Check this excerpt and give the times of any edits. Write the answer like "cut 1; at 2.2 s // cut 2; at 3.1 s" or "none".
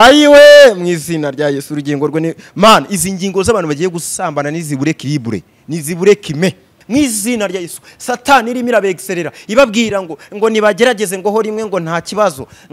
cut 1; at 6.7 s